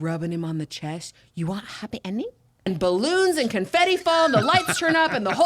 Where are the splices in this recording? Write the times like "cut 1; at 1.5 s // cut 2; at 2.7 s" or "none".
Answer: cut 1; at 2.7 s